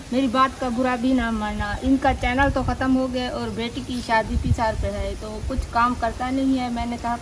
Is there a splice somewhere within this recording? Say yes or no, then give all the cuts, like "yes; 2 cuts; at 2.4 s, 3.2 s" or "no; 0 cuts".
no; 0 cuts